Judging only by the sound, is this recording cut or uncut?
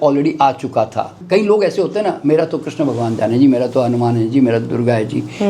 cut